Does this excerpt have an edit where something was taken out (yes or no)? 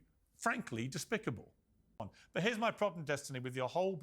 yes